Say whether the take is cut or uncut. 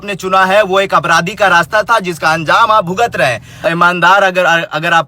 cut